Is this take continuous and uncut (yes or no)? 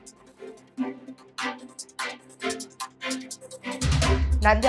no